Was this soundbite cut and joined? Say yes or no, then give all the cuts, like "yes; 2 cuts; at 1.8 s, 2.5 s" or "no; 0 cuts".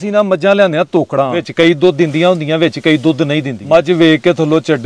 yes; 2 cuts; at 1.4 s, 3.6 s